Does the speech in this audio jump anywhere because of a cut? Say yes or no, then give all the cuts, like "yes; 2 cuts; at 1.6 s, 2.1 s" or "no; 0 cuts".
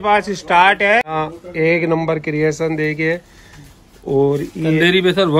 yes; 1 cut; at 1.1 s